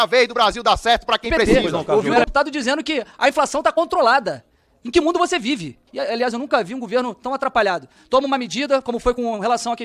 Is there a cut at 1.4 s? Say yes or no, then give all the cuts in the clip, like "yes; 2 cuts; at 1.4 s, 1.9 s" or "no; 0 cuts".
yes; 2 cuts; at 1.4 s, 5.9 s